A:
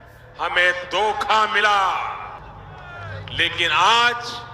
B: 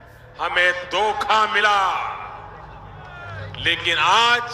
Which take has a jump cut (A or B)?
A